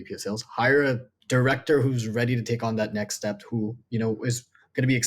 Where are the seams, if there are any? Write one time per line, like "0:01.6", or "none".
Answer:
0:01.1

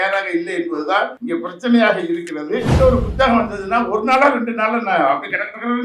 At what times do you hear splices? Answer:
0:01.2
0:02.7

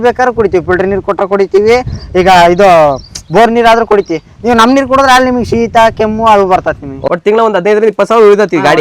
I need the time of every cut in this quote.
0:06.9

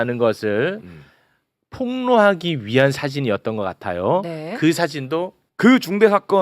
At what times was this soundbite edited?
0:05.4

